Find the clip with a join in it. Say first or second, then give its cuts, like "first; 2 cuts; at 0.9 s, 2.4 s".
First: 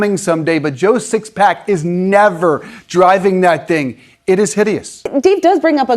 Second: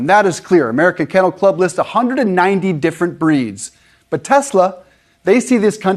first; 1 cut; at 5.0 s